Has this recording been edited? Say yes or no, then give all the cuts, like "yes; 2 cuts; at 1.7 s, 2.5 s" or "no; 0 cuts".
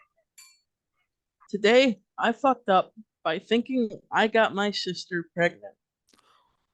yes; 1 cut; at 1.5 s